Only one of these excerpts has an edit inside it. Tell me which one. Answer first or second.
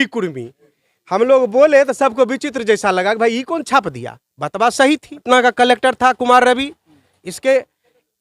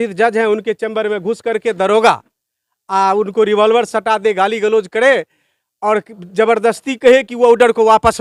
first